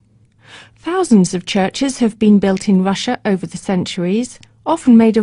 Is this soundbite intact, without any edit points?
yes; 0 cuts

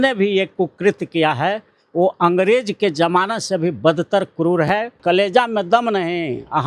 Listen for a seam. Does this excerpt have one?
yes; 1 cut; at 5.0 s

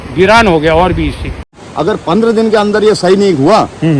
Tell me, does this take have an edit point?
yes; 1 cut; at 1.6 s

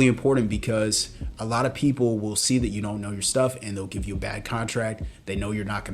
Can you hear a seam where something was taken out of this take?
no; 0 cuts

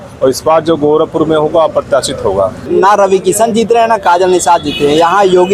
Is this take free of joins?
no; 1 cut; at 2.6 s

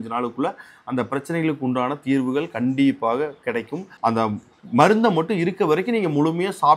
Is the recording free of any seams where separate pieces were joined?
yes; 0 cuts

